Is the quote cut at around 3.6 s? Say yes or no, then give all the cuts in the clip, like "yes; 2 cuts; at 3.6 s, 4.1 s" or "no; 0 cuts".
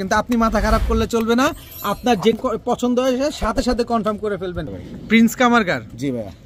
no; 2 cuts; at 2.3 s, 4.8 s